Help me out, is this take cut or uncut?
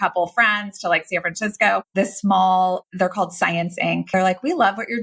cut